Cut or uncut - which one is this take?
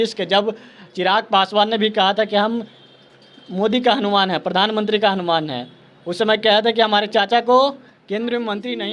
uncut